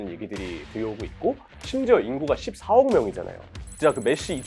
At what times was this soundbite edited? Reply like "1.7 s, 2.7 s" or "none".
1.5 s, 3.5 s

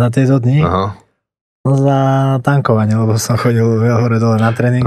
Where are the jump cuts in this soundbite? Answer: none

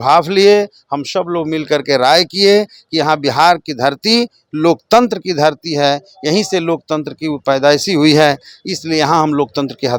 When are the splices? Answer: none

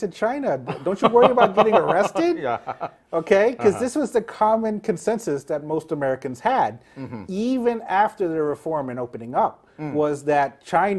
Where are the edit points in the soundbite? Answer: none

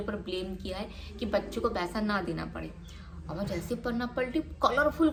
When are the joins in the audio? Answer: none

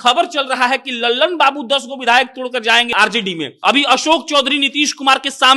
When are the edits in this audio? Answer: 3.0 s

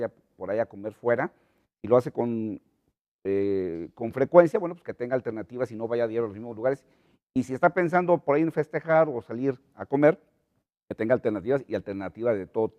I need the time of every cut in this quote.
5.0 s

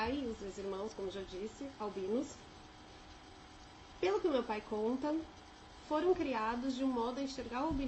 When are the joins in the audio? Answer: 5.1 s

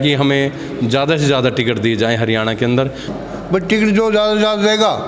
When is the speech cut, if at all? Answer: 3.1 s

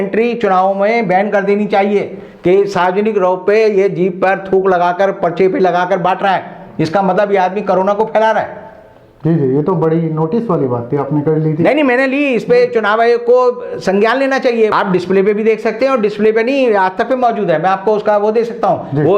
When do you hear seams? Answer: none

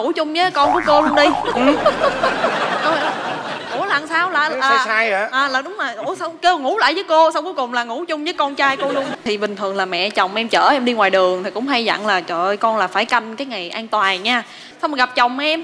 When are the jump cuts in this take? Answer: 9.1 s

